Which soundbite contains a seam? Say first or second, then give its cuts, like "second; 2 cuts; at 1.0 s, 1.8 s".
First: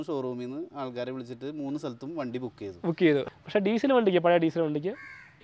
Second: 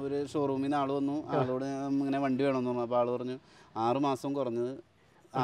first; 1 cut; at 3.3 s